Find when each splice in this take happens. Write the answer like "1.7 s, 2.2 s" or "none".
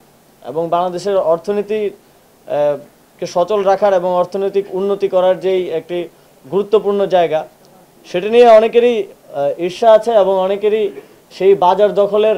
none